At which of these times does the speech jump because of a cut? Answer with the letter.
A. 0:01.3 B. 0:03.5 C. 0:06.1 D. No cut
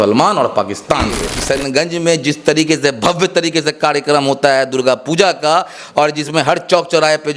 A